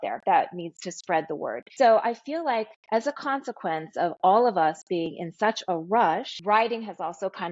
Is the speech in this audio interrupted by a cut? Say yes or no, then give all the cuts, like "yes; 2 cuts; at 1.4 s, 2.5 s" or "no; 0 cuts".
yes; 2 cuts; at 1.6 s, 6.3 s